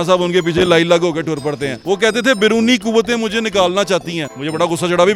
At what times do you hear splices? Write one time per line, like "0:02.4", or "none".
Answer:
0:01.7